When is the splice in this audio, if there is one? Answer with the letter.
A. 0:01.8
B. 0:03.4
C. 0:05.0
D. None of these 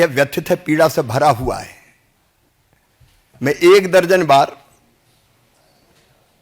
D